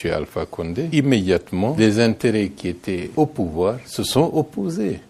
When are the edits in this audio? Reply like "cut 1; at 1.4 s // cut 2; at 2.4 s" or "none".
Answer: cut 1; at 0.9 s // cut 2; at 1.5 s // cut 3; at 3.1 s // cut 4; at 3.9 s